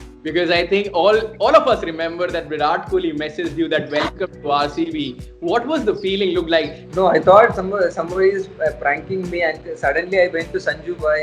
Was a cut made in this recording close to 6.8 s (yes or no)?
yes